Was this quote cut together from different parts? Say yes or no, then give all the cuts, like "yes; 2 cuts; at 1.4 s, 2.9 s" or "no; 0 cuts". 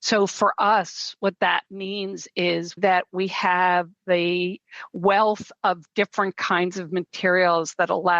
yes; 1 cut; at 2.8 s